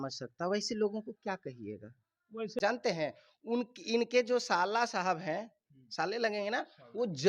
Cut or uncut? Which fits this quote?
cut